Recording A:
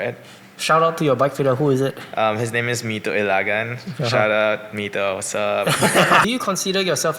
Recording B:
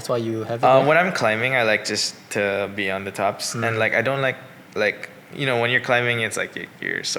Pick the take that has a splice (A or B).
A